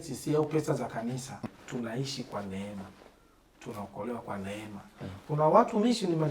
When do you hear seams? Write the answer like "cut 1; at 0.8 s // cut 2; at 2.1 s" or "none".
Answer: cut 1; at 1.4 s